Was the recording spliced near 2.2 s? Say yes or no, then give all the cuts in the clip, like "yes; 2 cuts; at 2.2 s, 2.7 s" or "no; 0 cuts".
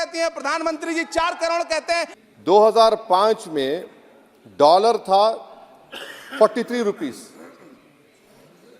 yes; 1 cut; at 2.2 s